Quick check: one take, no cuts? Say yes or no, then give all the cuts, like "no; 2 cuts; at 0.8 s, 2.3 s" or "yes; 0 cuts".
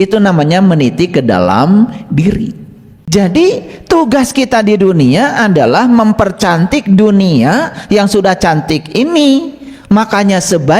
no; 1 cut; at 3.1 s